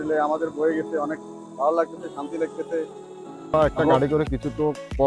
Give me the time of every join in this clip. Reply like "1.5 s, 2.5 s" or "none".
3.5 s